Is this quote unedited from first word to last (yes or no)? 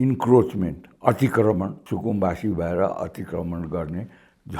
no